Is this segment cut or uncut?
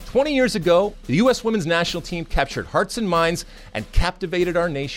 cut